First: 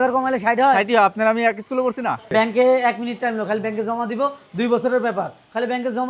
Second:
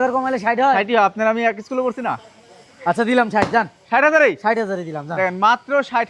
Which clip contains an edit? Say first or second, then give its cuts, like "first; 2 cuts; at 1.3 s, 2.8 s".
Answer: first; 1 cut; at 2.3 s